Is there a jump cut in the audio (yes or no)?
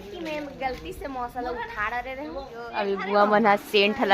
yes